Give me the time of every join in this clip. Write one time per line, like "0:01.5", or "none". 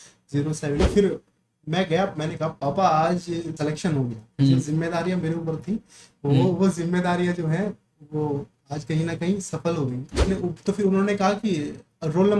0:00.8
0:02.6
0:03.5
0:10.1